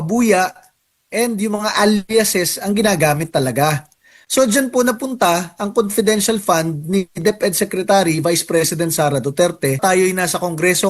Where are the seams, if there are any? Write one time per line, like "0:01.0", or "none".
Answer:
0:09.8